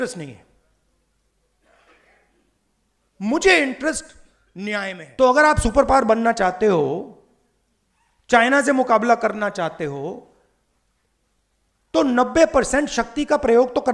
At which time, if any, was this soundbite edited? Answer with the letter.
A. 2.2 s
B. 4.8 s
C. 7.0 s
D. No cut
B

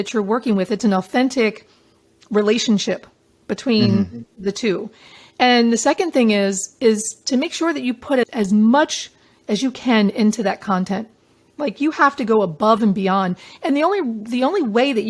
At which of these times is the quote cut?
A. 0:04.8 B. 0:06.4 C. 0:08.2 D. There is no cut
C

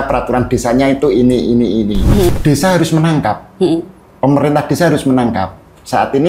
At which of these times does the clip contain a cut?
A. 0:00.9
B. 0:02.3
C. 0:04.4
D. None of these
B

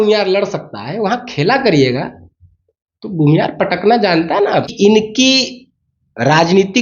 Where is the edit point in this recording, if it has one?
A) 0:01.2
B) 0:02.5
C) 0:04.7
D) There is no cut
C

